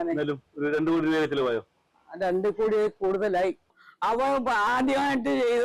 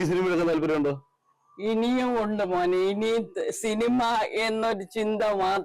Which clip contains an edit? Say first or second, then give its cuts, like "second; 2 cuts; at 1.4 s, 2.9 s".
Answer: first; 1 cut; at 3.7 s